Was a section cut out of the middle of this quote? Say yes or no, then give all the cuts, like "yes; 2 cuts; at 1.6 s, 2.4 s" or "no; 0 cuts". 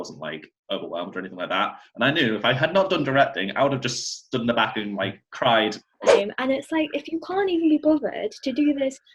yes; 1 cut; at 6.1 s